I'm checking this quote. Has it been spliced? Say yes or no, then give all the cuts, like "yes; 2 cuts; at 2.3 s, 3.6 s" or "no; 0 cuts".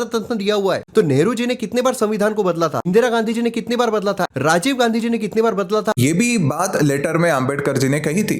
yes; 4 cuts; at 0.8 s, 2.9 s, 4.3 s, 6.0 s